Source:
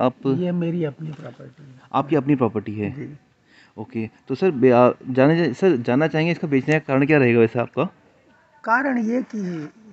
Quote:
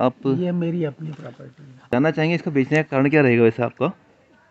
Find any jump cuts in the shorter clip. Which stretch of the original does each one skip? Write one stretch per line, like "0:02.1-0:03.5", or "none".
0:01.9-0:05.8